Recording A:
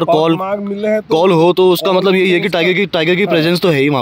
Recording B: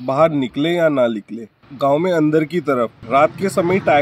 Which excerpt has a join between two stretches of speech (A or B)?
B